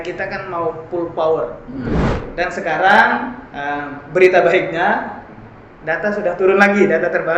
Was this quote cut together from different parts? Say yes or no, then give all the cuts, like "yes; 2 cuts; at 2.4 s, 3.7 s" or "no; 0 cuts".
yes; 1 cut; at 2.1 s